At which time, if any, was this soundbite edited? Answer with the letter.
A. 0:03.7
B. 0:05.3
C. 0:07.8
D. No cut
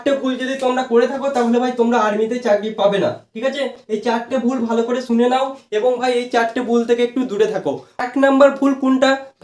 D